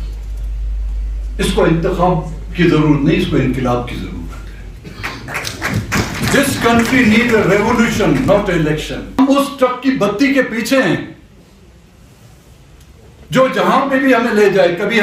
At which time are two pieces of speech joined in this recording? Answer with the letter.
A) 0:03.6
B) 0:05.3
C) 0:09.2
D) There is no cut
C